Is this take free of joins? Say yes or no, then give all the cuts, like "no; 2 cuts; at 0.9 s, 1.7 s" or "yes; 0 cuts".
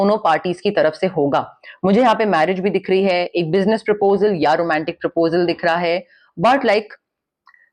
yes; 0 cuts